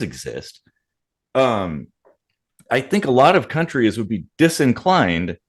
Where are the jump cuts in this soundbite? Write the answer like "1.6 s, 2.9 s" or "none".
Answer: none